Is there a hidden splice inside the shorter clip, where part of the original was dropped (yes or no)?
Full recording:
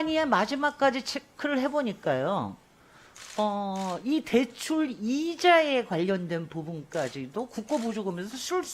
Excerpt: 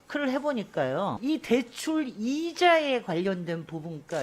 yes